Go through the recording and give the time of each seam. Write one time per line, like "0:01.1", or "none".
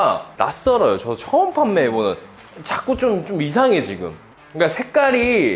0:02.4

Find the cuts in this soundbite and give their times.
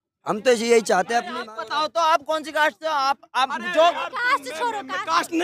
0:01.3

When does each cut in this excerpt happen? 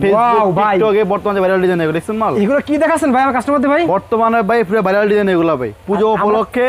none

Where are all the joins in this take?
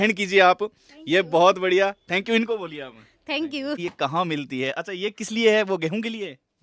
0:03.8

